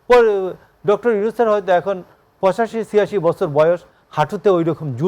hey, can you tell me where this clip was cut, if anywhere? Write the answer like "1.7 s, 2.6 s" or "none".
none